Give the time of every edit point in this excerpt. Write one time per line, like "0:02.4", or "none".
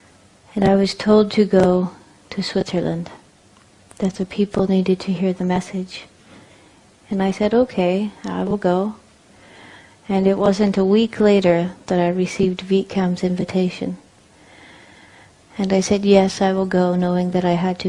0:11.7